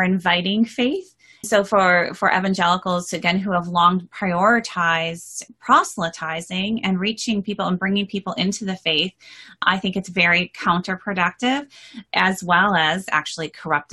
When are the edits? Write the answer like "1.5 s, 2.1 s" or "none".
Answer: 1.5 s, 5.4 s, 9.6 s, 12.0 s, 13.1 s